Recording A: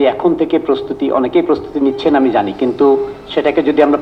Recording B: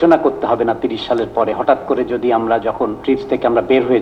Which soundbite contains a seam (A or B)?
B